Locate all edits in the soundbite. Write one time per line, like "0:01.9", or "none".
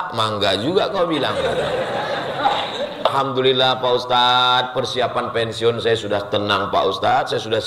0:03.0